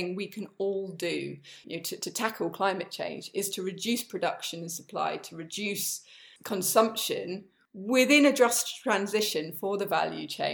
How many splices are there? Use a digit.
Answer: 1